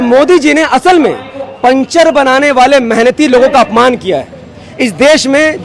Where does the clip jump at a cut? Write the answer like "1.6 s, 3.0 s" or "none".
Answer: none